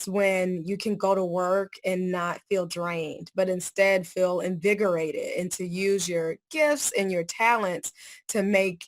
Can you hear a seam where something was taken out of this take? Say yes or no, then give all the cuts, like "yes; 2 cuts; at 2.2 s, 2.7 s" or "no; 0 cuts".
no; 0 cuts